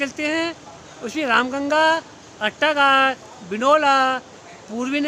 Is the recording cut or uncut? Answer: uncut